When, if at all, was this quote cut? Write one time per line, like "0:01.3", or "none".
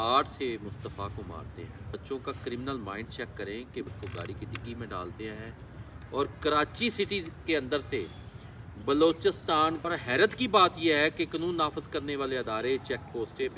0:01.9
0:03.9
0:09.8